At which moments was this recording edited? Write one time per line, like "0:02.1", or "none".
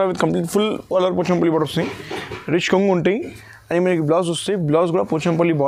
none